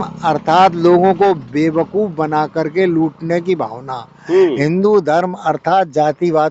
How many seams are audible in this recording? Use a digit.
0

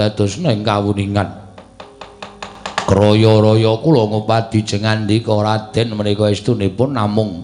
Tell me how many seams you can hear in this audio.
1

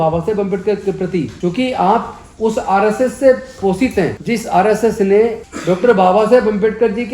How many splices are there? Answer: 3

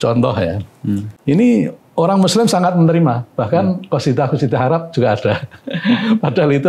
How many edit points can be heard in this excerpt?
1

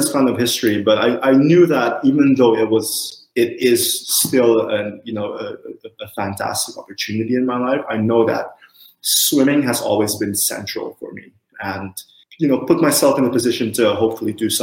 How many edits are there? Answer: 1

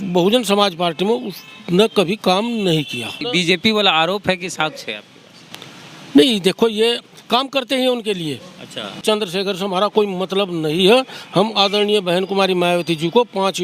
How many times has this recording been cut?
2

